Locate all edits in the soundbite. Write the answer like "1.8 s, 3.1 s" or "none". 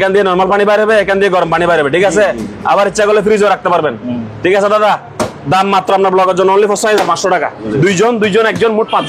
7.6 s